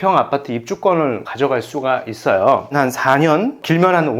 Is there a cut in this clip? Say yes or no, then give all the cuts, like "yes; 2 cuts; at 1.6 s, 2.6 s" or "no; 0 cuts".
yes; 2 cuts; at 1.2 s, 2.7 s